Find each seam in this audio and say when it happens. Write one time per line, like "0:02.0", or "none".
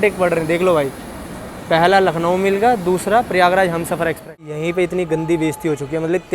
0:04.5